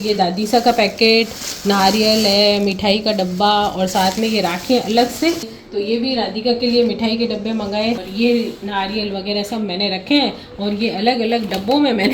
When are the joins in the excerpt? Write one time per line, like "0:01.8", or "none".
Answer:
0:05.5
0:08.0

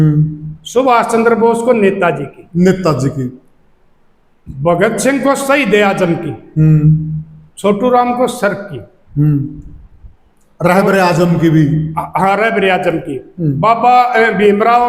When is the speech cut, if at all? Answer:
none

